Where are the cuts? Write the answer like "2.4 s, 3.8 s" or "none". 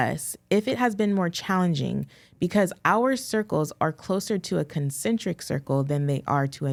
none